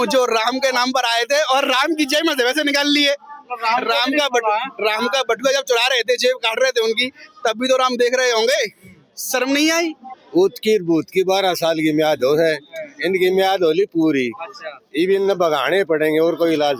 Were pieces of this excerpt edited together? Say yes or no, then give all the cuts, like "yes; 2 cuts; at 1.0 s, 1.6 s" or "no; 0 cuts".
yes; 1 cut; at 10.1 s